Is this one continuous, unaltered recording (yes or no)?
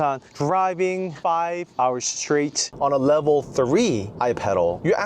no